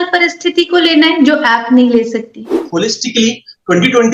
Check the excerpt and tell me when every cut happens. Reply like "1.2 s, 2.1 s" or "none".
2.6 s

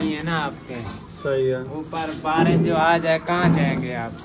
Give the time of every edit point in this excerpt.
none

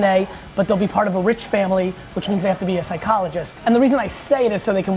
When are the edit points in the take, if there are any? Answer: 3.5 s

